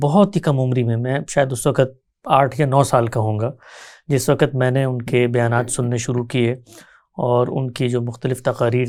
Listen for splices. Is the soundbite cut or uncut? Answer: uncut